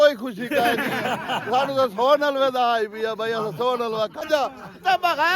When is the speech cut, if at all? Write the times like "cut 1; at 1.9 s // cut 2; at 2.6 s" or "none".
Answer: cut 1; at 4.2 s